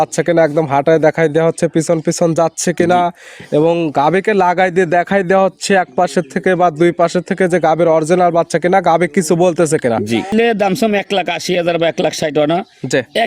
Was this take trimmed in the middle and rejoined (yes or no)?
yes